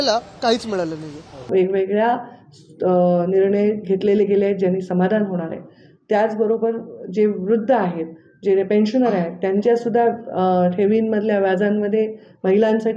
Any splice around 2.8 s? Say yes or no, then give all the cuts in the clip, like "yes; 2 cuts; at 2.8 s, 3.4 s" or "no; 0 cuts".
no; 1 cut; at 1.5 s